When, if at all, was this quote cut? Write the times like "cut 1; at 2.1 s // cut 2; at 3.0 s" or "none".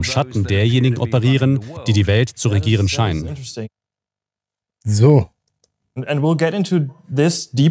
none